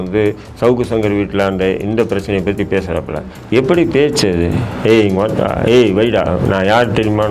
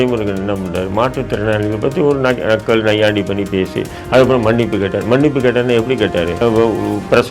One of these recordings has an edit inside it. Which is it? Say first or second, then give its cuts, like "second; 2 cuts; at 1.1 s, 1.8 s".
second; 1 cut; at 6.4 s